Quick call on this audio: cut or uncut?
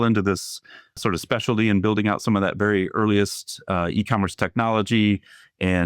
cut